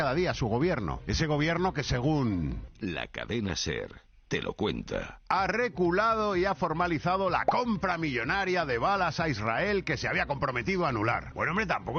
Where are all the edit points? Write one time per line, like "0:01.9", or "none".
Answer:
none

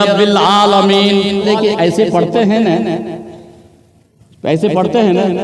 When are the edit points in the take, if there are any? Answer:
0:01.5

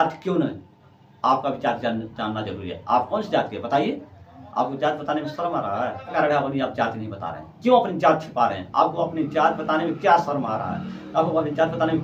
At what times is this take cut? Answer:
none

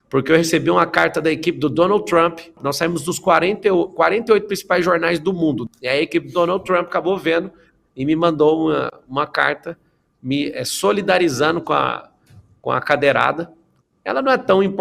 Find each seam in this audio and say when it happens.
0:02.6
0:05.6

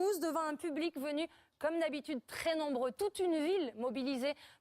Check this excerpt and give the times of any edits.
0:01.8

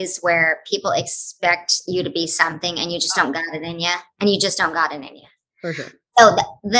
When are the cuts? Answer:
none

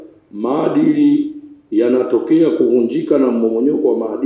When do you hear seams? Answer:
none

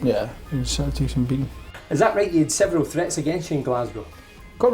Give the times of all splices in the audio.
0:01.6

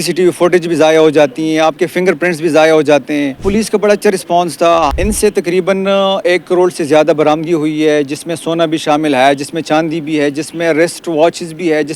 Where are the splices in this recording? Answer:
0:03.4
0:04.9

